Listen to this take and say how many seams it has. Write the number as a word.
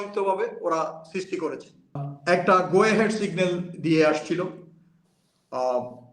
one